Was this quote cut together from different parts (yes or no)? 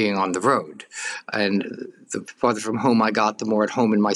no